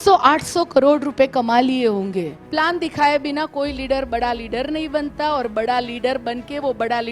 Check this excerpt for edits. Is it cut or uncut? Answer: cut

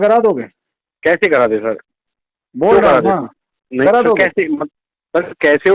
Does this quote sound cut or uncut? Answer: uncut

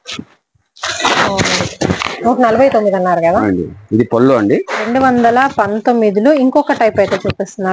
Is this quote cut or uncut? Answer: cut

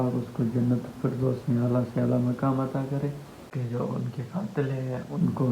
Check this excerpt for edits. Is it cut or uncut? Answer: cut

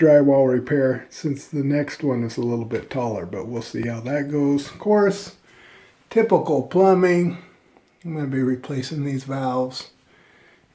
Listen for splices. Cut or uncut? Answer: uncut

